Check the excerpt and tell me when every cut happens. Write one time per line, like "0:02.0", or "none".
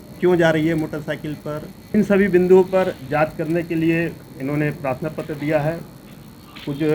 0:01.9